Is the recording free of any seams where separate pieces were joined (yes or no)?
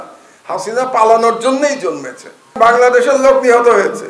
no